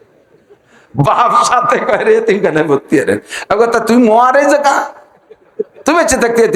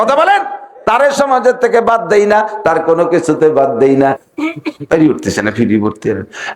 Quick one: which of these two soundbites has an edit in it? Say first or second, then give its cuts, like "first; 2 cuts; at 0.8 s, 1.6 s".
second; 1 cut; at 4.2 s